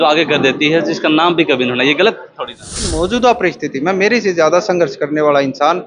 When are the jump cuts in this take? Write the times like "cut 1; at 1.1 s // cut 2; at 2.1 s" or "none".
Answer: cut 1; at 2.9 s